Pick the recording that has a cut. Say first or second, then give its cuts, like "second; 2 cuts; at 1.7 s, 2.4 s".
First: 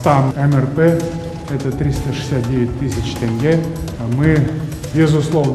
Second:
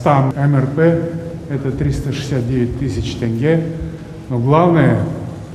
first; 1 cut; at 3.9 s